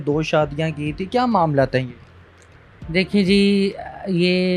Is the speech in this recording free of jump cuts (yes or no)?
yes